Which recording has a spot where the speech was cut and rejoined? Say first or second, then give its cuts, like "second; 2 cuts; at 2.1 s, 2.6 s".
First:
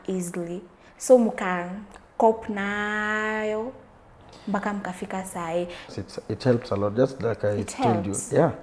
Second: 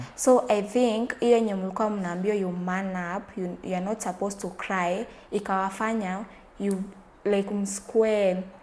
first; 1 cut; at 5.9 s